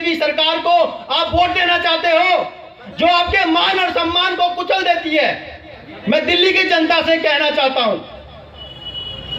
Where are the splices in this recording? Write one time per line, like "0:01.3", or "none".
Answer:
none

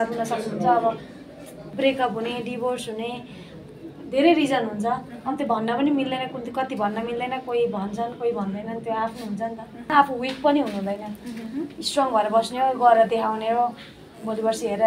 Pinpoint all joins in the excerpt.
0:01.6
0:09.9

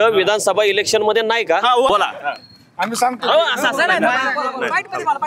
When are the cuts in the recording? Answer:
0:01.9

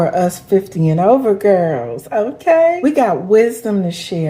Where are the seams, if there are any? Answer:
0:02.8

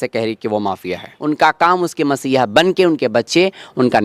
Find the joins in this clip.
0:01.1

